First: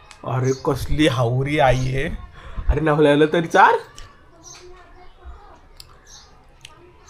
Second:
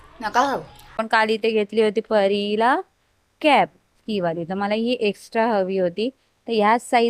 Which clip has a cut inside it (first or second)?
second